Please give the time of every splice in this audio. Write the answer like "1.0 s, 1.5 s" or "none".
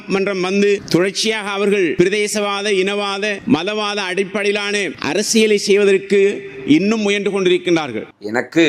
1.9 s, 3.4 s, 5.0 s